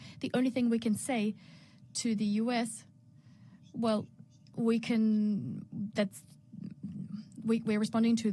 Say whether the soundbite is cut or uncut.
uncut